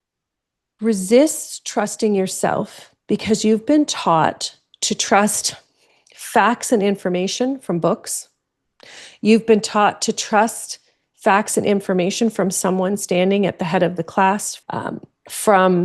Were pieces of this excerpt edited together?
yes; 1 cut; at 14.5 s

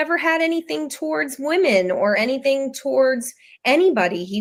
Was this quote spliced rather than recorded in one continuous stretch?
no; 0 cuts

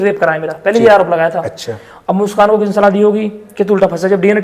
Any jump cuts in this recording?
no; 0 cuts

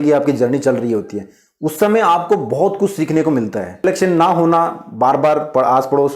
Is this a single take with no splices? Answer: no; 1 cut; at 3.8 s

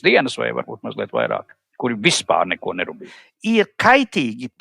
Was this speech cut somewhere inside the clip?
yes; 1 cut; at 3.0 s

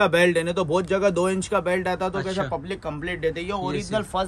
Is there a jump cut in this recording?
no; 0 cuts

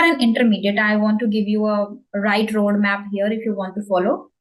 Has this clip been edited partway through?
no; 0 cuts

